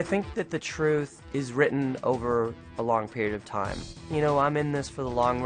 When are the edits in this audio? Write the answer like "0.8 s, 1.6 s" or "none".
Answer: 1.2 s